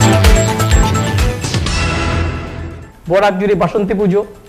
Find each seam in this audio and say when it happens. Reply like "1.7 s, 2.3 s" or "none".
1.4 s, 2.8 s